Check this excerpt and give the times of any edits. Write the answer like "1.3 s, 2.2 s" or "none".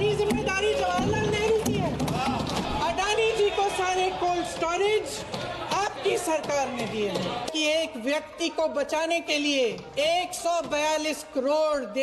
2.7 s, 7.5 s, 9.8 s